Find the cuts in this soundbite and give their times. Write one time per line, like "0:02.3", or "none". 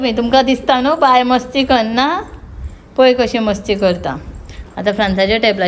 none